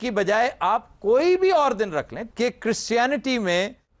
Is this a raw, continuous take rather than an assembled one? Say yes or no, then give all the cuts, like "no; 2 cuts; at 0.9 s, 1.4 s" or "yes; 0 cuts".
no; 1 cut; at 2.2 s